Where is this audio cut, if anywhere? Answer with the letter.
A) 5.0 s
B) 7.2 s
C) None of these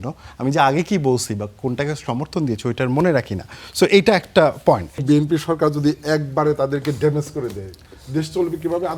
A